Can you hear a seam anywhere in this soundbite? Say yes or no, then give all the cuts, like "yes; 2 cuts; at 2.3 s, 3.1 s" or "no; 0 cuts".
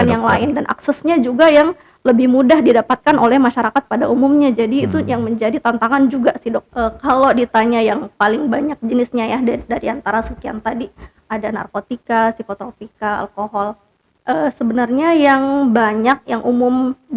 yes; 1 cut; at 6.7 s